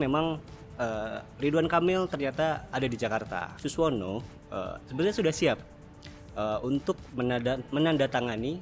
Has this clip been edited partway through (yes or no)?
yes